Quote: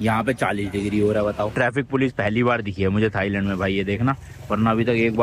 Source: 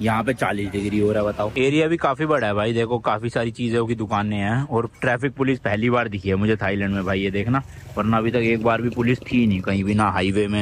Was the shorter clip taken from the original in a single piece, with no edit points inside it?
no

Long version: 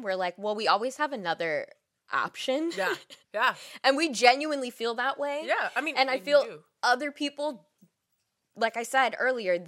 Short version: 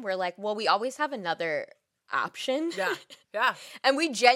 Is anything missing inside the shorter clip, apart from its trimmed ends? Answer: no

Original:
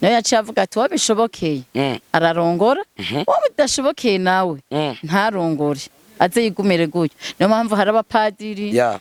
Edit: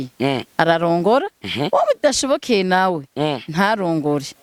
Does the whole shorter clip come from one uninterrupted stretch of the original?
yes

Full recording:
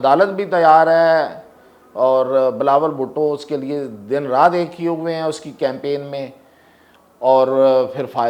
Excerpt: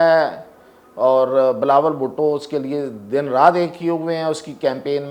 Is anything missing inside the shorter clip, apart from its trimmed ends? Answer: no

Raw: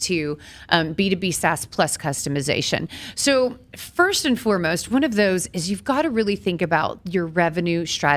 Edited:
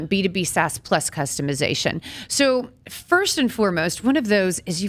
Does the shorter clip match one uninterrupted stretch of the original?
yes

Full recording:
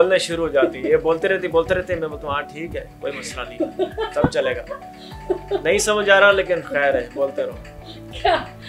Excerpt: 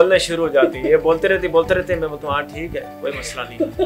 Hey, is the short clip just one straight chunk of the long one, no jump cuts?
yes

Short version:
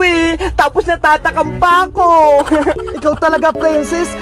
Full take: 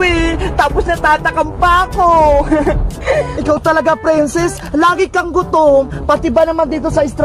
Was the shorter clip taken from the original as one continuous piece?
no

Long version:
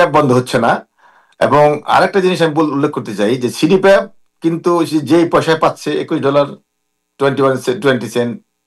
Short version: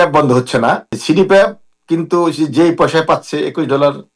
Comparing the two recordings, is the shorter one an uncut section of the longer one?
no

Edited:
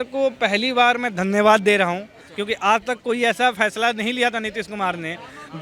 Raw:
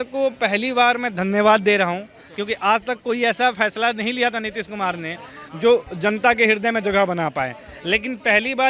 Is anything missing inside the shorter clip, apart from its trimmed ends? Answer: no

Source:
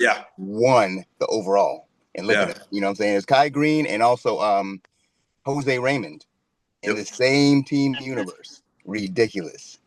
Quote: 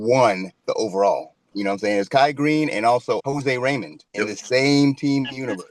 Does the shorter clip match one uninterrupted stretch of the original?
no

